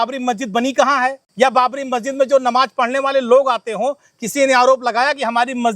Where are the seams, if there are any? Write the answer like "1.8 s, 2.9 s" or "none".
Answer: 1.2 s

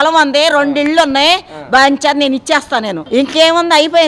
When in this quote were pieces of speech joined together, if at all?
3.0 s

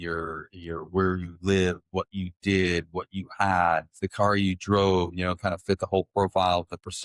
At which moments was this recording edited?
4.0 s

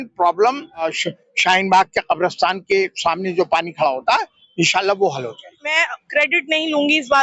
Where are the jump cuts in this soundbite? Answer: 0.9 s, 5.7 s

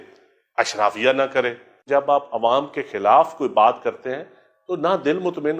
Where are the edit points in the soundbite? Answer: 1.8 s

